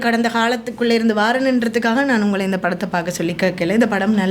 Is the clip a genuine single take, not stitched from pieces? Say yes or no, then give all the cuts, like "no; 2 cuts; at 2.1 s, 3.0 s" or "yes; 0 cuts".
yes; 0 cuts